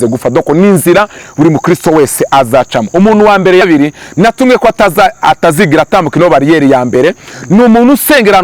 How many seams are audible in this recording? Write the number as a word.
one